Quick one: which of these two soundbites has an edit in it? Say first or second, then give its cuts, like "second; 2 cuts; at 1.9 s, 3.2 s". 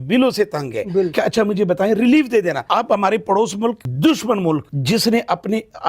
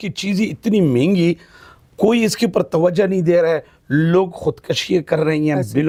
first; 4 cuts; at 1.1 s, 2.6 s, 3.9 s, 4.7 s